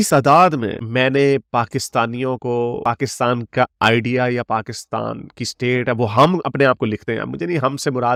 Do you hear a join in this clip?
no; 0 cuts

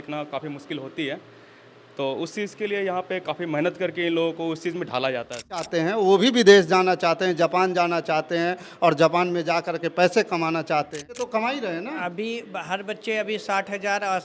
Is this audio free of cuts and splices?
no; 2 cuts; at 5.7 s, 11.2 s

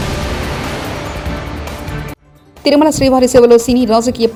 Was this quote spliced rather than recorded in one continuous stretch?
no; 0 cuts

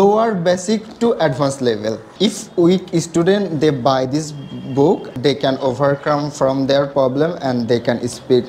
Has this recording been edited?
yes; 2 cuts; at 2.1 s, 5.1 s

